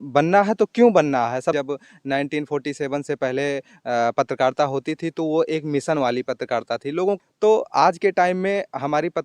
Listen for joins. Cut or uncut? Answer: cut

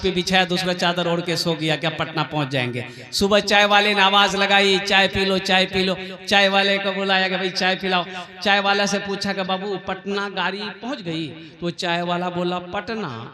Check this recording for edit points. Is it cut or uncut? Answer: uncut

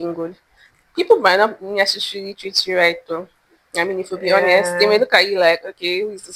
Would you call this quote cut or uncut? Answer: uncut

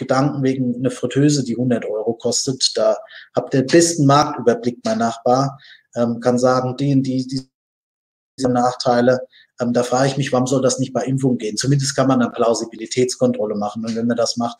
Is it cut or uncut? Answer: uncut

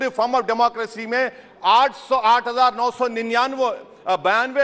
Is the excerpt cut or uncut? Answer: uncut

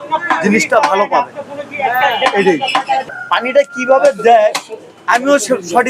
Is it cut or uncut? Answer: cut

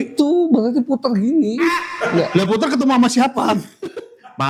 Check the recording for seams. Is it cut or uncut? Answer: uncut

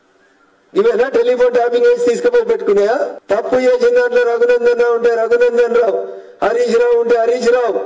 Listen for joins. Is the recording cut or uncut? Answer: cut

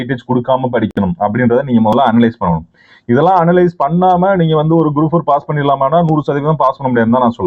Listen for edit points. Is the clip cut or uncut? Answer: uncut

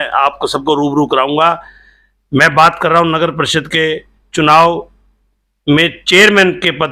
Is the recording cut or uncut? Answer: uncut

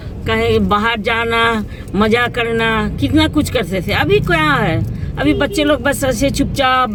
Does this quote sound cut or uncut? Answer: uncut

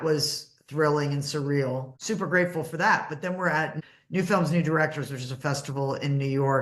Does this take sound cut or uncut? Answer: cut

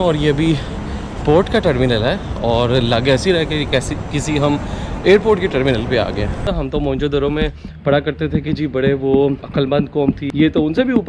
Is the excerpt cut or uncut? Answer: cut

